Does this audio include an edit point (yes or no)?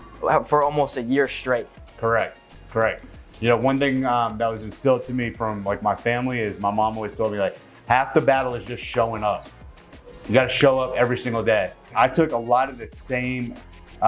yes